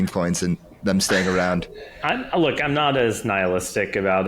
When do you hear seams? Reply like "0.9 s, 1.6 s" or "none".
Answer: none